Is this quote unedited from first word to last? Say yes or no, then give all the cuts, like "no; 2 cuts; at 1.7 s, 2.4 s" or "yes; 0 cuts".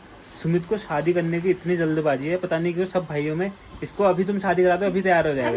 yes; 0 cuts